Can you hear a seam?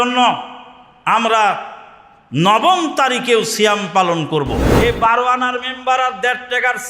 yes; 1 cut; at 4.7 s

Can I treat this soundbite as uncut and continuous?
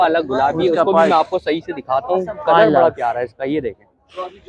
yes; 0 cuts

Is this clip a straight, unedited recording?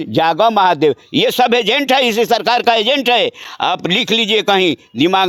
yes; 0 cuts

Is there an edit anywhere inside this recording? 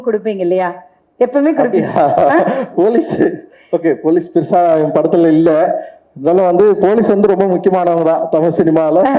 no; 0 cuts

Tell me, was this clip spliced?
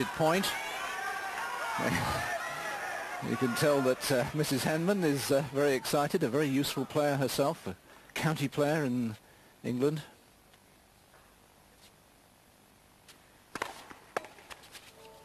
no; 0 cuts

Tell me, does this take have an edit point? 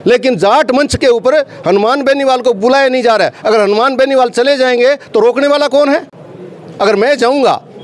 no; 0 cuts

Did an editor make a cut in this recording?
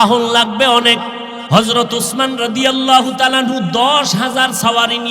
yes; 1 cut; at 1.3 s

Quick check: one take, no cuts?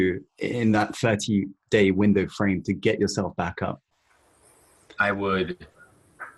no; 1 cut; at 4.0 s

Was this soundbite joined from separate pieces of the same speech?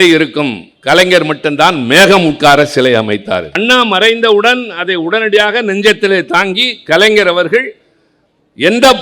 yes; 1 cut; at 3.6 s

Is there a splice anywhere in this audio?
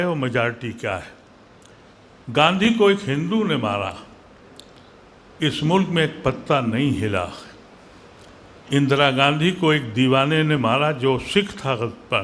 no; 0 cuts

